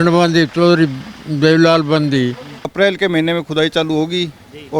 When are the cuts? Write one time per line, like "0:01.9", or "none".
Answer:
0:02.6